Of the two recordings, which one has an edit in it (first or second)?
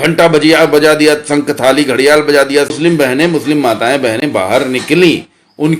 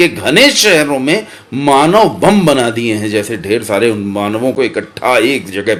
first